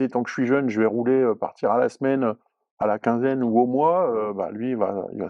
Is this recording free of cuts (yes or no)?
yes